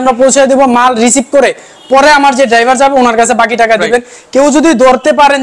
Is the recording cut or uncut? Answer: uncut